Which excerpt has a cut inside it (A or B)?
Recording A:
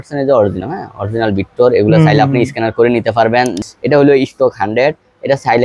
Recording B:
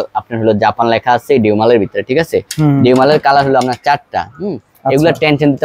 A